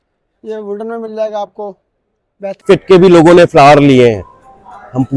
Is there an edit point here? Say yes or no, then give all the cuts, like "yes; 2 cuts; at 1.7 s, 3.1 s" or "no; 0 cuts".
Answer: yes; 1 cut; at 2.6 s